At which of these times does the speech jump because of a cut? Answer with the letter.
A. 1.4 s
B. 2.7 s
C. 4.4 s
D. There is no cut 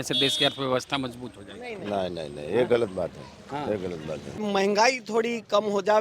C